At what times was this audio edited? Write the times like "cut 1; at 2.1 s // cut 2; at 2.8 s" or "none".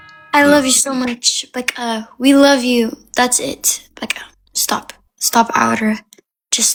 none